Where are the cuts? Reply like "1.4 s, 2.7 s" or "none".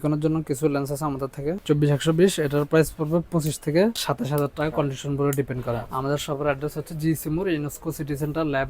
1.6 s, 4.1 s, 5.9 s